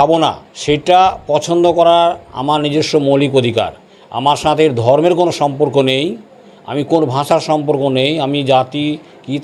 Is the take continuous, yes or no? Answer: yes